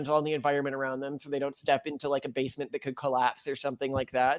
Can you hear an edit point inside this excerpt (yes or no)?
no